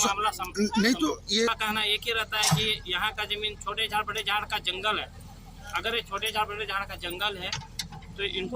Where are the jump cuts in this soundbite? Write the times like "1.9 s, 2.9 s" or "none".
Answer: 1.5 s